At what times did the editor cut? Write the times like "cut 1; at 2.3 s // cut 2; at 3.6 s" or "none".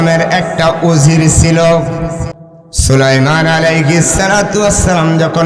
cut 1; at 2.3 s